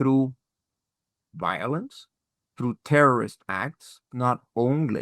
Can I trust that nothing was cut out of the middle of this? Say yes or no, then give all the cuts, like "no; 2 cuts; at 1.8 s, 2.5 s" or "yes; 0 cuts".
no; 1 cut; at 4.1 s